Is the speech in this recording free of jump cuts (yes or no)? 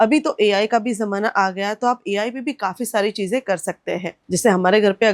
no